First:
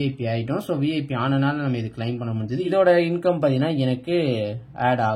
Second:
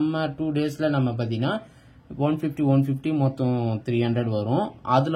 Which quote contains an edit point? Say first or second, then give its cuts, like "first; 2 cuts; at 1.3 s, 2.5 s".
first; 1 cut; at 2.7 s